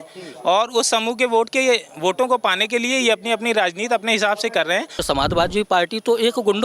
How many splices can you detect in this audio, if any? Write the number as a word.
one